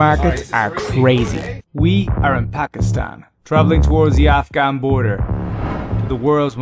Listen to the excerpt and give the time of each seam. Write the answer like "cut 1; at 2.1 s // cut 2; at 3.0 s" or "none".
none